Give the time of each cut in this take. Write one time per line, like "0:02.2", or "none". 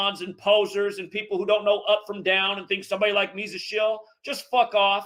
none